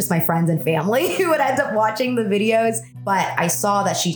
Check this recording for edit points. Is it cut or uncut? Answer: cut